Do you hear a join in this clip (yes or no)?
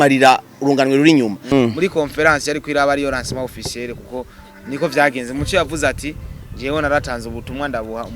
yes